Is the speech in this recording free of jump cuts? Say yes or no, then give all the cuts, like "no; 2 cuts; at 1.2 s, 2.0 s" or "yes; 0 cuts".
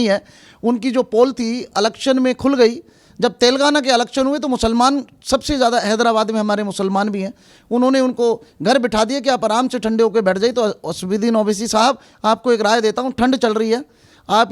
yes; 0 cuts